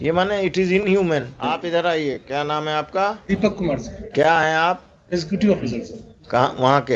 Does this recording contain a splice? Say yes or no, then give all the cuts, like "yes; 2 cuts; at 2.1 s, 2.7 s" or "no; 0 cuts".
yes; 1 cut; at 1.4 s